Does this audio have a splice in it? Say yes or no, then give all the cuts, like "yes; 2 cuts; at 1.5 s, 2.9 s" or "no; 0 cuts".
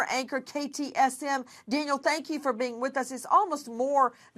no; 0 cuts